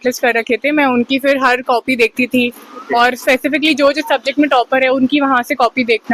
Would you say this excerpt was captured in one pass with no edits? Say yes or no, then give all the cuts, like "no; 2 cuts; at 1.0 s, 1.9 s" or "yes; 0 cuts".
yes; 0 cuts